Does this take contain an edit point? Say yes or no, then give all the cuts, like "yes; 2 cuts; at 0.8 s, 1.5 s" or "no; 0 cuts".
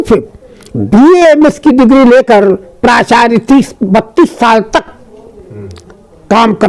no; 0 cuts